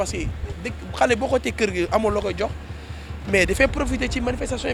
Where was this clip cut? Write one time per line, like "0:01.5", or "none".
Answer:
none